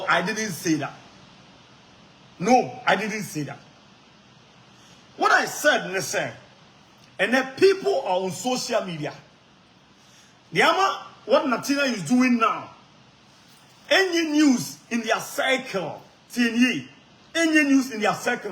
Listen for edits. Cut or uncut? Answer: uncut